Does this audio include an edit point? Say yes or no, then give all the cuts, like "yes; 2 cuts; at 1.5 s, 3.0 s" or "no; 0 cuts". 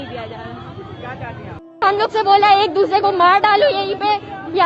yes; 1 cut; at 1.6 s